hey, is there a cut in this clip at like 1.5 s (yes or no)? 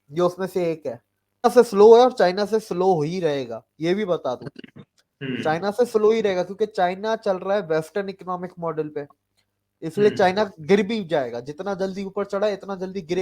yes